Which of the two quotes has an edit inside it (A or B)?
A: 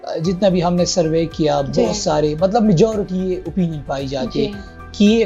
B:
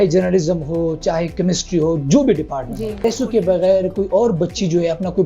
B